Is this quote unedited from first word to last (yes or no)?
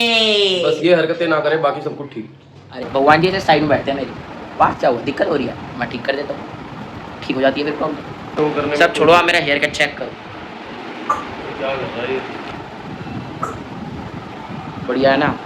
no